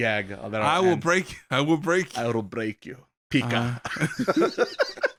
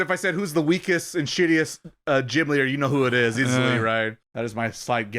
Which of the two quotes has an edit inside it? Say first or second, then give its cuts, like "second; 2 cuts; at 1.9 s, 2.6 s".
second; 1 cut; at 4.2 s